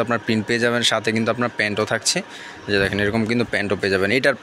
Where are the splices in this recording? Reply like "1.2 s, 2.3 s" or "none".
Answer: none

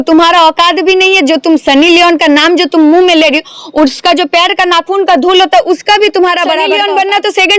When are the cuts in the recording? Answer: 6.6 s

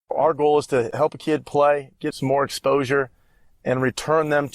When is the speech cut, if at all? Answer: 0.9 s, 2.1 s

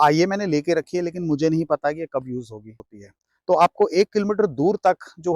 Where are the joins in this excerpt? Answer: 2.8 s

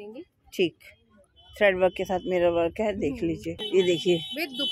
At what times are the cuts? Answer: 3.5 s

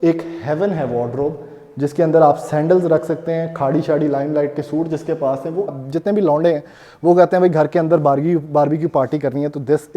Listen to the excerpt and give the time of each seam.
5.8 s

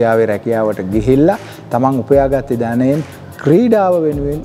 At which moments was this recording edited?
none

